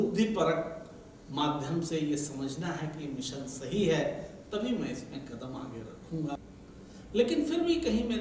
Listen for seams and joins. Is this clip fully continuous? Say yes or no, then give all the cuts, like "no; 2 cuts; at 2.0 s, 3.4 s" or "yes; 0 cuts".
no; 1 cut; at 6.4 s